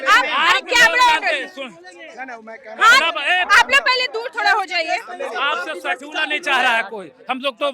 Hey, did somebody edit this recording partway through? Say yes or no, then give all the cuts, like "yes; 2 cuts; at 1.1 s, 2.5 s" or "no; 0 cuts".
no; 0 cuts